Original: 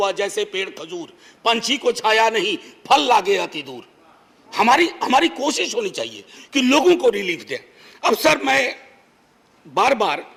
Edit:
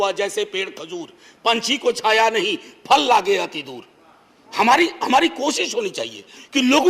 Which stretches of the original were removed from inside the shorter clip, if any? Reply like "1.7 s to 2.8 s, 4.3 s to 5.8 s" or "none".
none